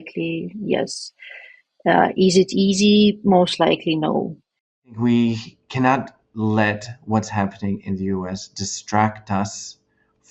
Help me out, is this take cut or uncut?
cut